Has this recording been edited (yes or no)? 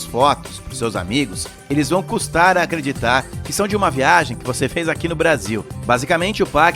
yes